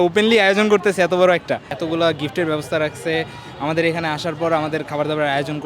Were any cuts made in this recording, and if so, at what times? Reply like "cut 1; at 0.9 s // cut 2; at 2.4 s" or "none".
cut 1; at 1.7 s